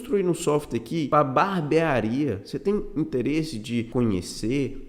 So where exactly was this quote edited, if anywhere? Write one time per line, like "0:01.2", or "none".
0:01.1
0:03.9